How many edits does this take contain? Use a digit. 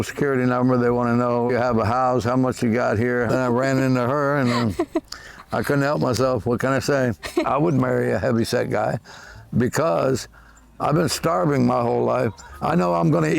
3